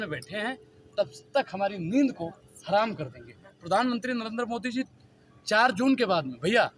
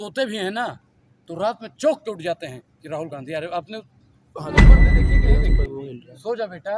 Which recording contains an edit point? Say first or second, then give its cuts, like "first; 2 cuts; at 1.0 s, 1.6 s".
second; 2 cuts; at 4.5 s, 5.4 s